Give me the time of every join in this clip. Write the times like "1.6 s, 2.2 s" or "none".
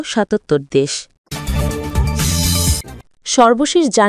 1.2 s, 2.9 s